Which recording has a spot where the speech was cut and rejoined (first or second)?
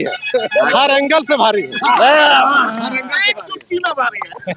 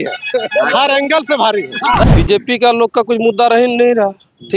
second